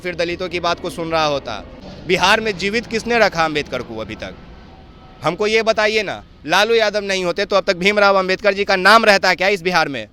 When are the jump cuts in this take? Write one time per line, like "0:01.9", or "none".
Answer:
0:01.8